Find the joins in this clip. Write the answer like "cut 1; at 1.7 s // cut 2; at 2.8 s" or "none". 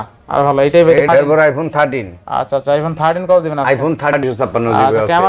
cut 1; at 1.0 s // cut 2; at 4.2 s

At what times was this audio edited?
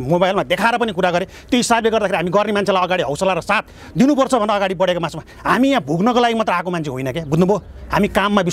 none

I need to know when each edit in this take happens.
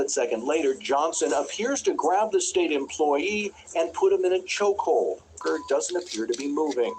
cut 1; at 5.4 s

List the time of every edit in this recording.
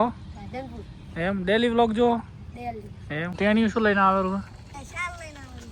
cut 1; at 3.3 s

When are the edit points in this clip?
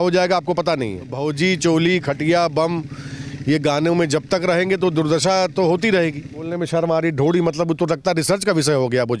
cut 1; at 1.1 s // cut 2; at 6.5 s

